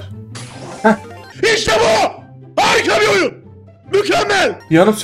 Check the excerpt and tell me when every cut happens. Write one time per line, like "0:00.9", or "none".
none